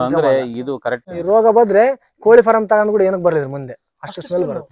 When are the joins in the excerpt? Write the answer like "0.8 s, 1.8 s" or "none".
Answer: 1.1 s